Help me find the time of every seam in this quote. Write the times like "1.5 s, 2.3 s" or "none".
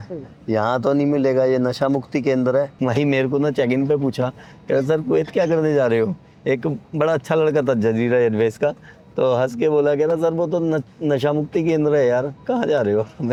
none